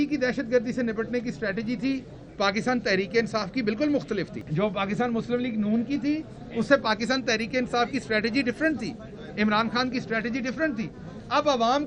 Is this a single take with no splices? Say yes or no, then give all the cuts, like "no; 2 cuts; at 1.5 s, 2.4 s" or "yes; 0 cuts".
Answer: no; 1 cut; at 4.4 s